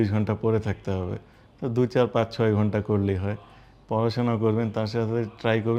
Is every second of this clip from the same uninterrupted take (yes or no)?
yes